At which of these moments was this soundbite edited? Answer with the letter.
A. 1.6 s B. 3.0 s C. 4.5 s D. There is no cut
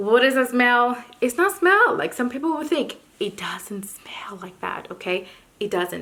D